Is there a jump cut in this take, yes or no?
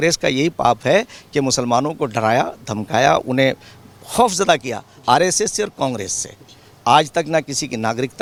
no